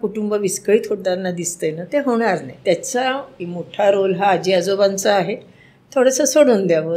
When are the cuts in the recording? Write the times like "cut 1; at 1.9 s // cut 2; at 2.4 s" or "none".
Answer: cut 1; at 2.5 s // cut 2; at 3.4 s